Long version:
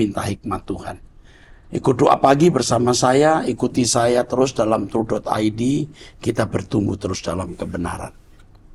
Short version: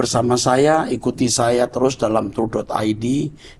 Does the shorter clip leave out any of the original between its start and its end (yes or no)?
no